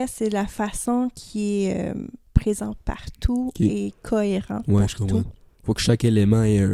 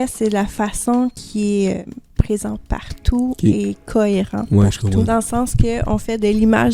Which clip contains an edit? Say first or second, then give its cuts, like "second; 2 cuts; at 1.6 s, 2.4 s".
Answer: second; 2 cuts; at 1.8 s, 5.1 s